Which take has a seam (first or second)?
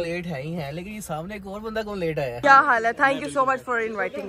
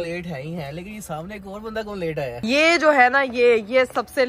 first